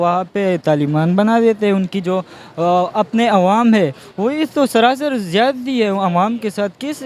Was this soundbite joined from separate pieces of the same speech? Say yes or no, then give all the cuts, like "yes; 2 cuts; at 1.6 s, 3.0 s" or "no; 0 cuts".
no; 0 cuts